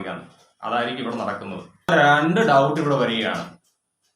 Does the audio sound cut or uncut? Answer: cut